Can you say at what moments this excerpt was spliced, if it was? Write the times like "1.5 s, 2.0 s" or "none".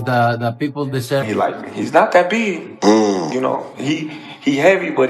1.2 s